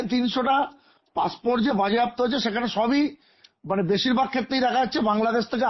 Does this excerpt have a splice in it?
no; 0 cuts

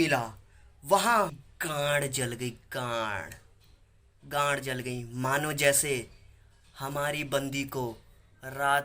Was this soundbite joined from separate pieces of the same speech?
yes; 1 cut; at 1.4 s

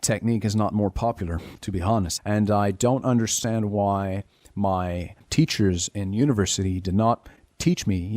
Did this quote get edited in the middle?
yes; 2 cuts; at 2.1 s, 5.2 s

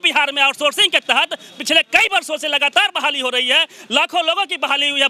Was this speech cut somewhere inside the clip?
no; 0 cuts

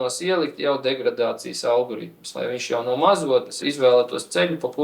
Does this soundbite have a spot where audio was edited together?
yes; 1 cut; at 3.6 s

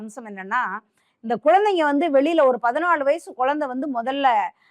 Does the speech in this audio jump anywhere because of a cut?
no; 0 cuts

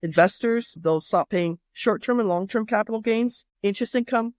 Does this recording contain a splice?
yes; 2 cuts; at 0.8 s, 3.5 s

